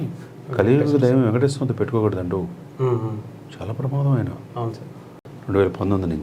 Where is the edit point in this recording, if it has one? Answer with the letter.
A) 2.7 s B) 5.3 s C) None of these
B